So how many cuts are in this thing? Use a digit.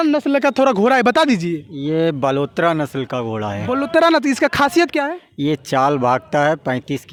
0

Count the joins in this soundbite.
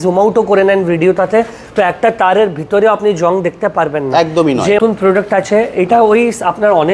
1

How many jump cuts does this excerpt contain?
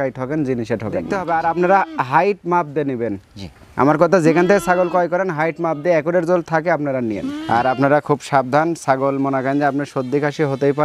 2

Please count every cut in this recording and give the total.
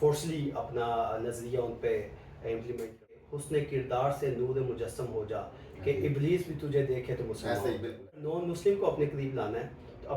2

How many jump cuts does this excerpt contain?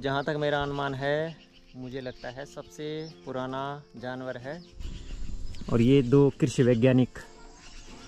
1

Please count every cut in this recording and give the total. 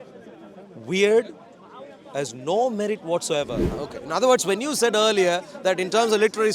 1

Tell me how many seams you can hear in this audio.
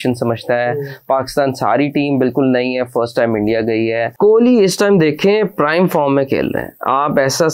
1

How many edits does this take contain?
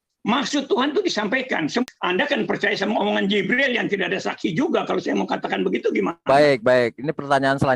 1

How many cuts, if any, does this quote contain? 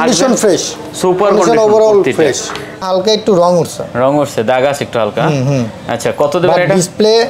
1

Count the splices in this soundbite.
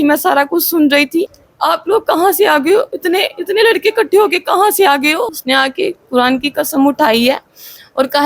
2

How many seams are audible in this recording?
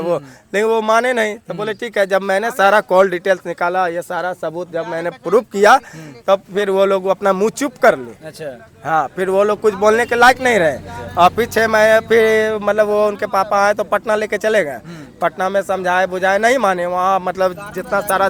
0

